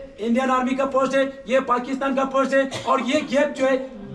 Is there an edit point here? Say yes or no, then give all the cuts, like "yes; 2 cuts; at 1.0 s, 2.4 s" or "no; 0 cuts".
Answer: no; 0 cuts